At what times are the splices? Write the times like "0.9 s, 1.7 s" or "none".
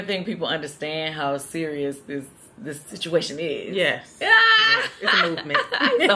none